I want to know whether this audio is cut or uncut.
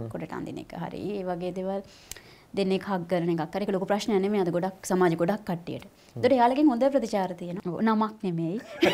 cut